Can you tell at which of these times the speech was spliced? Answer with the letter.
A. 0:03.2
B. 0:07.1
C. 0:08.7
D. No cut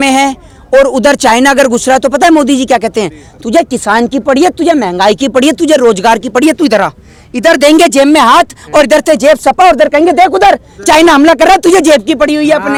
D